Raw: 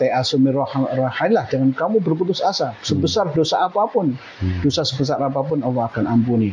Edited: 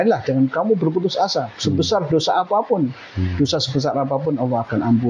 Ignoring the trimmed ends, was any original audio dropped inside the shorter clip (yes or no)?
no